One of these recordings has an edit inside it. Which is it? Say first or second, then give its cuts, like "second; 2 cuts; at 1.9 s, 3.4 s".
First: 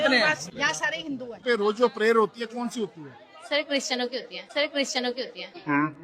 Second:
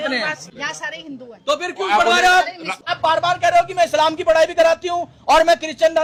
first; 1 cut; at 1.4 s